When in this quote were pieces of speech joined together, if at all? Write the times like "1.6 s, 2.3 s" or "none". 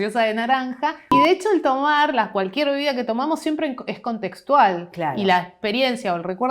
1.1 s